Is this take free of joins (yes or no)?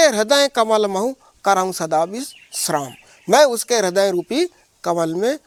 yes